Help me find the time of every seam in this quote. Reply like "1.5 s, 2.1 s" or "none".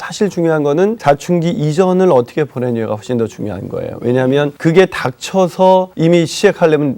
1.0 s, 4.5 s, 5.9 s